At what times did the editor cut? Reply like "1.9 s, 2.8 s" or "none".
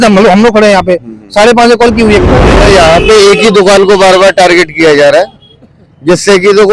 2.4 s